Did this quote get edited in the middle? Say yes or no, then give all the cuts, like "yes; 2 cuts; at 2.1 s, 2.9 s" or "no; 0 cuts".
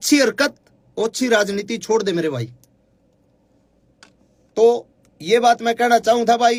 no; 0 cuts